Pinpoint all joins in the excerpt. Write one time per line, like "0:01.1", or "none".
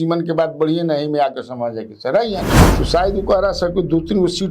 0:02.6

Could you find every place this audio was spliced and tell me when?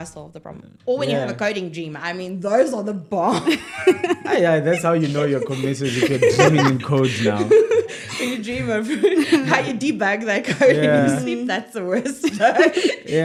none

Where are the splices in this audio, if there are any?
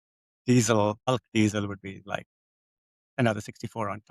0:01.1

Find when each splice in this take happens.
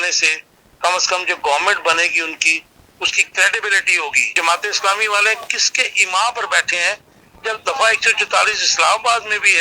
0:04.3

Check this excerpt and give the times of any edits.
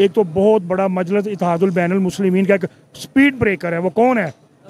none

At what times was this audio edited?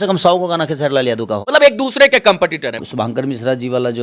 0:01.4
0:02.8

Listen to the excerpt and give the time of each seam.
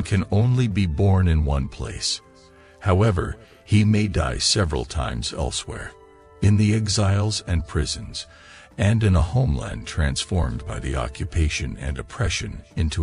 none

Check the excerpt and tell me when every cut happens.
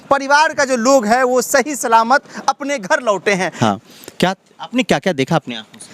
0:03.5

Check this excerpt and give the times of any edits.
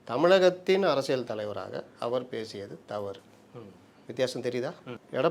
none

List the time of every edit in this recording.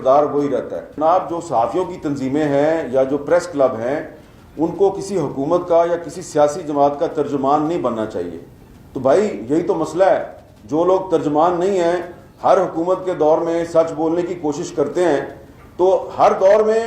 0:00.9

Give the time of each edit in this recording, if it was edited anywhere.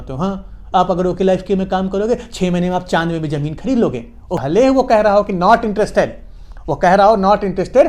0:04.4

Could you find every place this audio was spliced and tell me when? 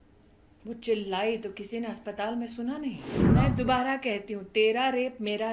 0:03.1

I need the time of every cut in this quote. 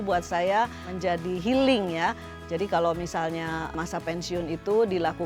0:02.3
0:03.7

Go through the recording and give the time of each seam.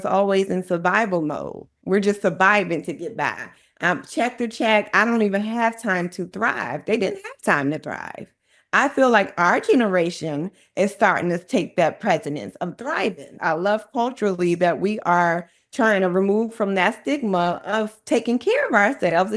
0:01.7
0:13.3

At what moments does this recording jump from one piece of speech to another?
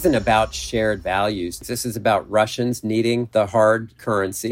0:01.6
0:03.3

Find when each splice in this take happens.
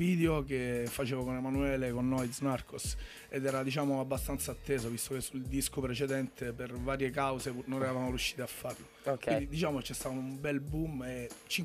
0:08.0

